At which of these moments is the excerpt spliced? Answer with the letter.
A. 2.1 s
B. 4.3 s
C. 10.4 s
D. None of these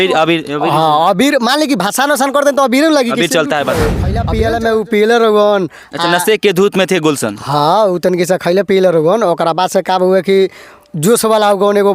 B